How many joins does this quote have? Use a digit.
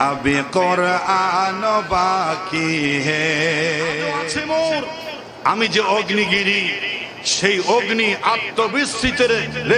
1